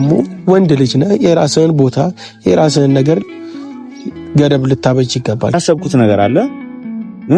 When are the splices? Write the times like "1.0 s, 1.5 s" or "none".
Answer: 5.5 s